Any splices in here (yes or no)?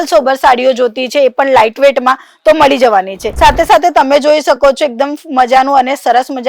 no